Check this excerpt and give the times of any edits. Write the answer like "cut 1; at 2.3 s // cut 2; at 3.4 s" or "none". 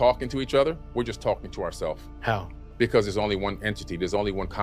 cut 1; at 2.1 s

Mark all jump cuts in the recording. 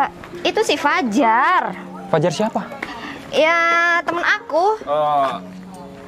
none

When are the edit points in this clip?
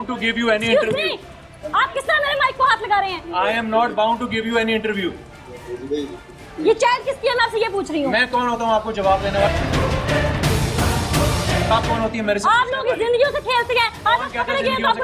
none

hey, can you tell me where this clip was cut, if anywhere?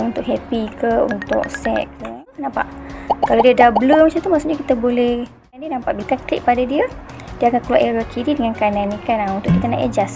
cut 1; at 2.5 s // cut 2; at 5.6 s

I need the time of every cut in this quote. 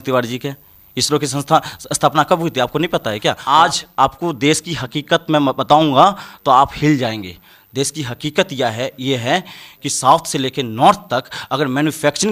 cut 1; at 3.4 s

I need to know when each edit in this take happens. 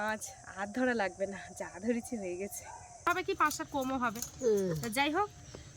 cut 1; at 3.1 s

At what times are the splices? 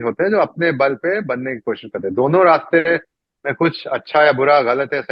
none

